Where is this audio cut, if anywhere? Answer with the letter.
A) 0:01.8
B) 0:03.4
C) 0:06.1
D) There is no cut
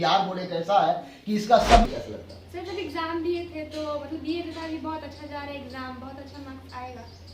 A